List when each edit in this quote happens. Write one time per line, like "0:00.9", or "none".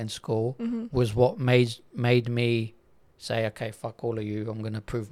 none